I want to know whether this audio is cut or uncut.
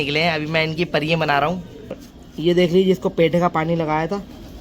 cut